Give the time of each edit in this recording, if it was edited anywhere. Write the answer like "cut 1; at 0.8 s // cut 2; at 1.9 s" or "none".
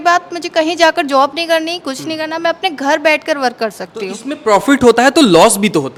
none